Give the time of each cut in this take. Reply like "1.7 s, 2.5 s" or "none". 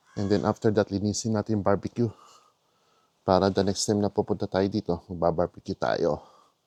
none